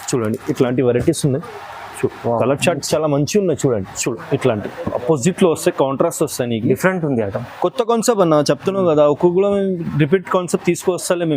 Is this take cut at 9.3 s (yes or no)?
no